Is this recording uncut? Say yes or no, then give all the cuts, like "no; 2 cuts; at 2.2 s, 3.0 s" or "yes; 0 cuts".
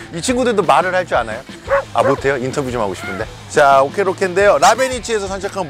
yes; 0 cuts